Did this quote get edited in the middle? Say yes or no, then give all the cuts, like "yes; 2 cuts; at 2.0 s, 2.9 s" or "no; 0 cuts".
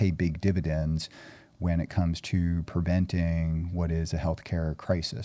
no; 0 cuts